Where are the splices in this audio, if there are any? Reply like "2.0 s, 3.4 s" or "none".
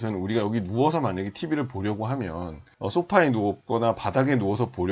2.6 s